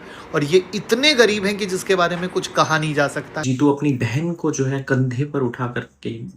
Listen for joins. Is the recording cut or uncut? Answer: cut